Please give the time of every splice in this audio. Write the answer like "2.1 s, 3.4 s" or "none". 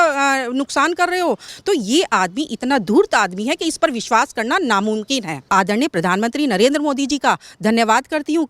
1.5 s, 5.4 s